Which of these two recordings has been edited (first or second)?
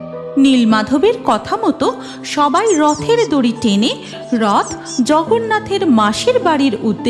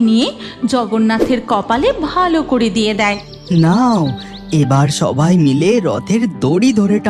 second